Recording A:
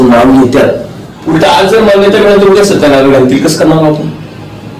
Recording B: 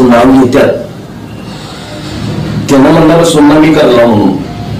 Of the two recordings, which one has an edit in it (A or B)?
A